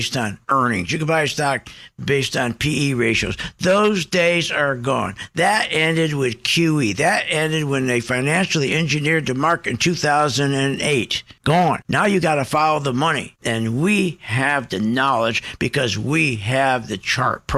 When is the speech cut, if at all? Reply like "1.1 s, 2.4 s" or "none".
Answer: none